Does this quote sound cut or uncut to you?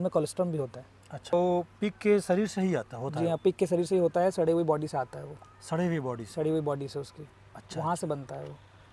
cut